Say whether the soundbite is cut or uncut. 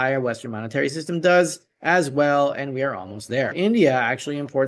cut